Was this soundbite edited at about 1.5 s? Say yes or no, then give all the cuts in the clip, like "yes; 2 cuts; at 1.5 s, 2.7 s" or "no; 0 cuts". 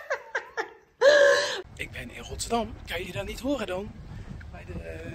yes; 1 cut; at 1.5 s